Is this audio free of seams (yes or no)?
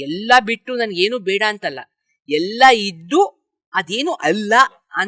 yes